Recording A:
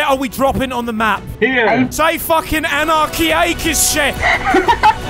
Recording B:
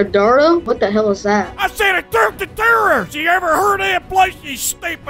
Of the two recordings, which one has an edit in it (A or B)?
A